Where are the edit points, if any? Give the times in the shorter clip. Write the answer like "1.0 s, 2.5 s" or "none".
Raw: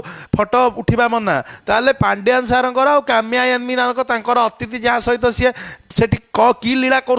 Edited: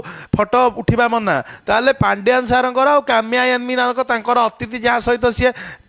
none